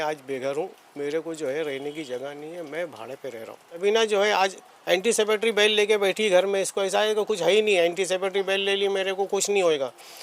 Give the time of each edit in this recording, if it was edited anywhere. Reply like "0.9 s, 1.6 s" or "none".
3.8 s